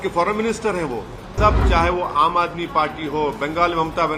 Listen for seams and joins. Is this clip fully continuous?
no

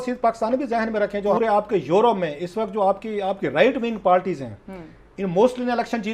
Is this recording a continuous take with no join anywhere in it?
no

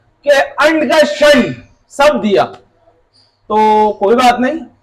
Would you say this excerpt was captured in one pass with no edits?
yes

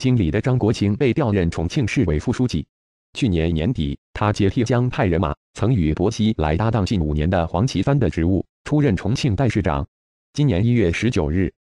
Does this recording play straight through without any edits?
yes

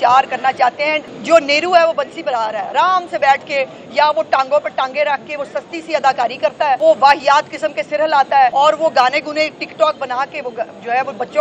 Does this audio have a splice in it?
yes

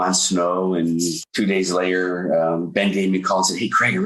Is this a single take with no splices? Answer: no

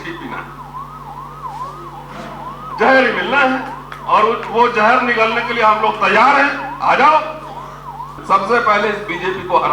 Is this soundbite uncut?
no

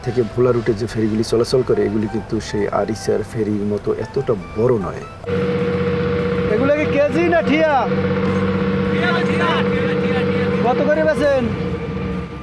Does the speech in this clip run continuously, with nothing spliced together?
no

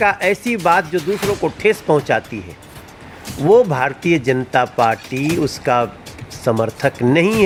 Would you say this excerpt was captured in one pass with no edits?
yes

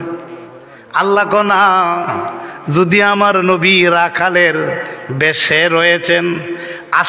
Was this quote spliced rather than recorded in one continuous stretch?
no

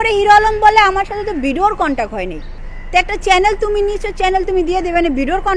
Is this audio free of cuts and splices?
yes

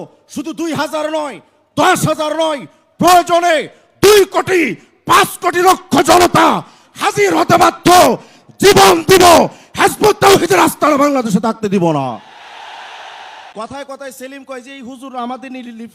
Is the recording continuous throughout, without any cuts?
no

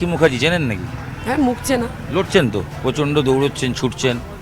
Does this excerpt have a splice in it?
no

